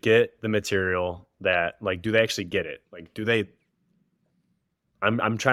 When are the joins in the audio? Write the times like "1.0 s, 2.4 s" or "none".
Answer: none